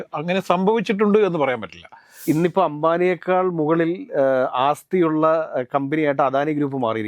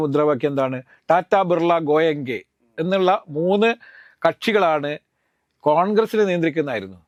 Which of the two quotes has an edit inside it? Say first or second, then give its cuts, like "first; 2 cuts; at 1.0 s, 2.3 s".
first; 1 cut; at 2.1 s